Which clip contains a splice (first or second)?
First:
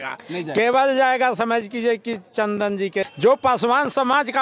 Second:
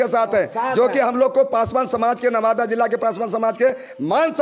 first